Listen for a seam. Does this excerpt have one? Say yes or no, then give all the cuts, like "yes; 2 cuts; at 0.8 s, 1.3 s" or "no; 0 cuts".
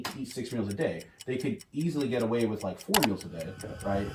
no; 0 cuts